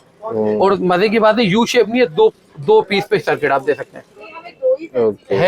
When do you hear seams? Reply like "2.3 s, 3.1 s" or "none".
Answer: none

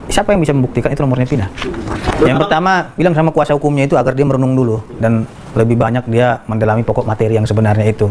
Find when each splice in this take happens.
2.1 s

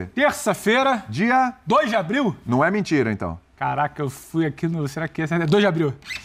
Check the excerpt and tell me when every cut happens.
none

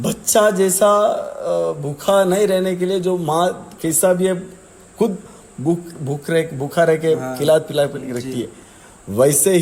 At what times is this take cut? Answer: none

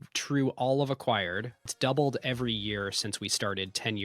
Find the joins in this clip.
1.6 s

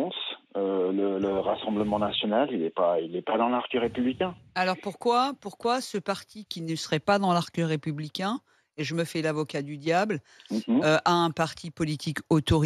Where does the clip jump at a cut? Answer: none

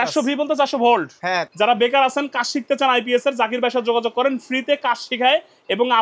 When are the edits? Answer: 1.5 s

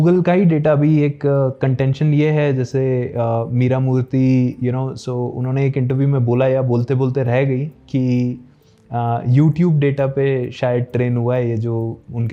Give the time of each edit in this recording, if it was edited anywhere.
none

